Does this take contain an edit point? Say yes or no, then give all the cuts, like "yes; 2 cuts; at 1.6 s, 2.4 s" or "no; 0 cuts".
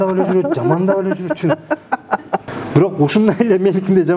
yes; 1 cut; at 2.5 s